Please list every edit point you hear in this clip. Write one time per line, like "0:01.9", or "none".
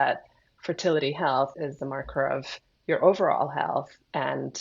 0:01.5